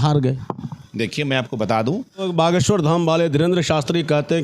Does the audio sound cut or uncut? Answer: cut